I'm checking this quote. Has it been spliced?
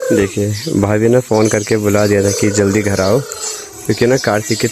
no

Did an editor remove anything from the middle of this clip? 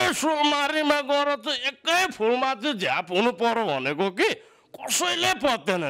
no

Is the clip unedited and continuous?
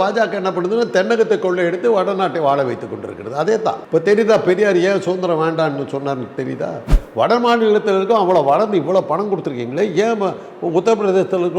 no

